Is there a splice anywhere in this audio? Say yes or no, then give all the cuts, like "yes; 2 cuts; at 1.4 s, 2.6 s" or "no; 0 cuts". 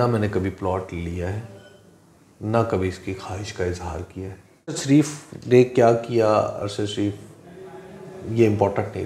yes; 1 cut; at 4.8 s